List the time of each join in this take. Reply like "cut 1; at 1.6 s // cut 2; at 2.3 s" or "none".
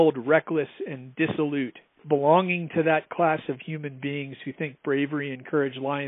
cut 1; at 2.0 s